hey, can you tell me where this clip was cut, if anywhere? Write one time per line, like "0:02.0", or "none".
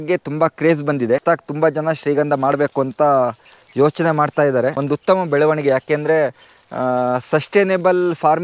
0:01.2
0:04.8